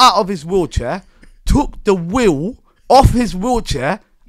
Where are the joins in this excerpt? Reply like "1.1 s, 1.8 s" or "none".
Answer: none